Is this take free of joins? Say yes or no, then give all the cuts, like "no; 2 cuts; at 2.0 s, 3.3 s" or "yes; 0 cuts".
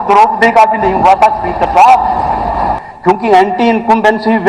no; 1 cut; at 2.8 s